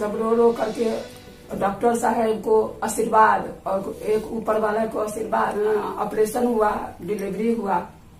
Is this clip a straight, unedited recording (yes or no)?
yes